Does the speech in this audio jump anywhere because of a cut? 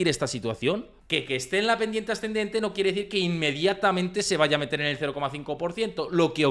yes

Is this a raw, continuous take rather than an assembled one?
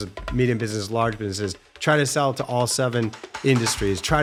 yes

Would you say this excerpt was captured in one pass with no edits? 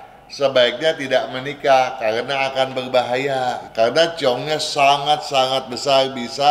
no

